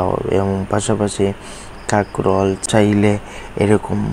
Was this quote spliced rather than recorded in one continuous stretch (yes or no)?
yes